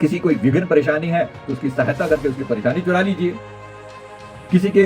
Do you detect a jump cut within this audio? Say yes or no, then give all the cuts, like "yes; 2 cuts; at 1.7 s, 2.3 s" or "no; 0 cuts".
no; 0 cuts